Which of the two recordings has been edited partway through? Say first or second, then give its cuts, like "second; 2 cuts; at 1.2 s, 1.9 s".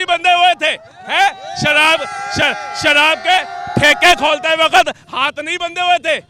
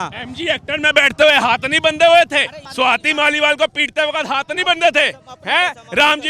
second; 1 cut; at 2.6 s